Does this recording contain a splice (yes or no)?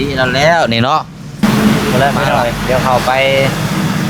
yes